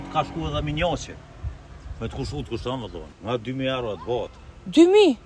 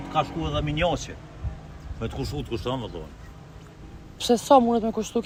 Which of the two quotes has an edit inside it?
first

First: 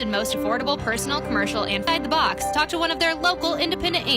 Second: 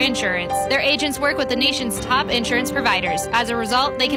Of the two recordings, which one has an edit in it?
first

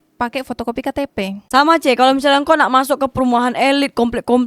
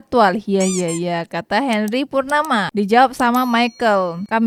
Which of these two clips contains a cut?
first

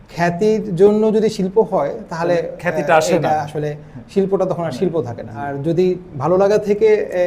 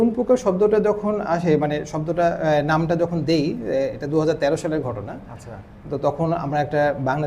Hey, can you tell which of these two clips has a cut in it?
first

